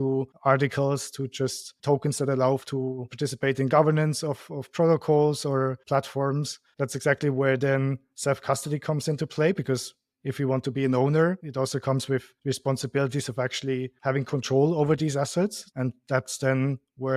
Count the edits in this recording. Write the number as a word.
two